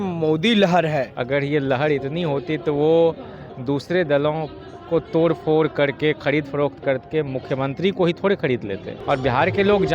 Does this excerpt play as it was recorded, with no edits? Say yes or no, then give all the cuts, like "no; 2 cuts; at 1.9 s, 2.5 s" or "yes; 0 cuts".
no; 2 cuts; at 1.1 s, 8.9 s